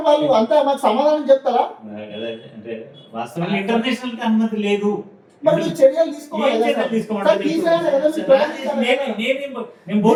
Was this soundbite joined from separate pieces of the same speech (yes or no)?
no